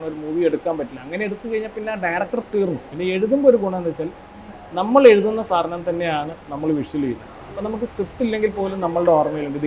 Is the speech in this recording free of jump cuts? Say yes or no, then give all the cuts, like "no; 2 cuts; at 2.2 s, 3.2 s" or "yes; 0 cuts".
no; 1 cut; at 2.9 s